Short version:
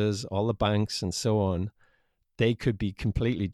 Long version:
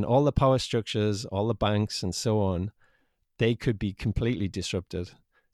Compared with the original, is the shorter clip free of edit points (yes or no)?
yes